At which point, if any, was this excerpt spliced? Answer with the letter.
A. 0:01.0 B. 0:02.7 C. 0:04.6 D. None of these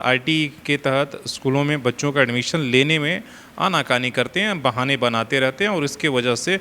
D